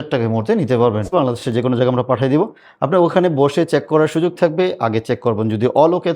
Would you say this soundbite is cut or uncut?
cut